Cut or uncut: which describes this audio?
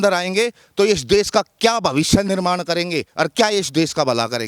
uncut